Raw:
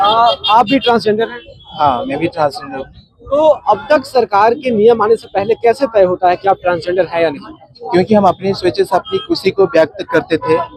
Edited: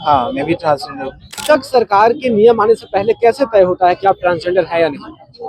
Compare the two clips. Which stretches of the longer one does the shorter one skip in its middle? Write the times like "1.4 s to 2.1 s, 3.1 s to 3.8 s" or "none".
3.1 s to 3.8 s